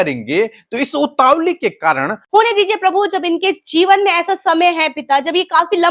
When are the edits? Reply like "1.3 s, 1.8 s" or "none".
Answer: 2.2 s